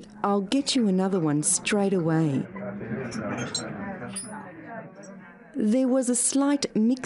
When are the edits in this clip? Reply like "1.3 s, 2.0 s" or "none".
none